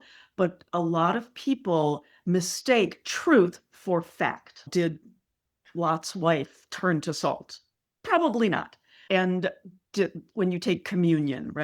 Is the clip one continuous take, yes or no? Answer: no